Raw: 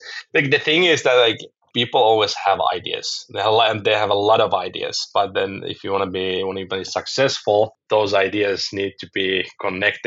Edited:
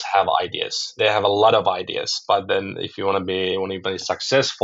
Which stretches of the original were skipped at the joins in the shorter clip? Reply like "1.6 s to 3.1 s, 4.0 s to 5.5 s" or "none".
3.2 s to 3.8 s